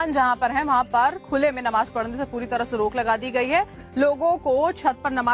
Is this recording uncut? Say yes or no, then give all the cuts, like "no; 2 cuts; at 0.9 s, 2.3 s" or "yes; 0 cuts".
yes; 0 cuts